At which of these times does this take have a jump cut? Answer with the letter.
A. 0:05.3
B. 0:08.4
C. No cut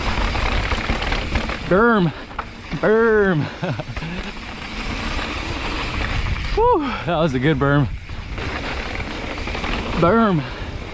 B